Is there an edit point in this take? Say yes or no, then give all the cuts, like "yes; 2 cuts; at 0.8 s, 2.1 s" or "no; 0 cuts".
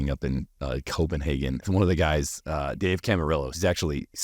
yes; 1 cut; at 1.6 s